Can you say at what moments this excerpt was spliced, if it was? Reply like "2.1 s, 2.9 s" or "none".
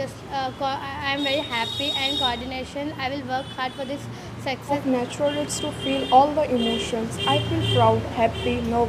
4.8 s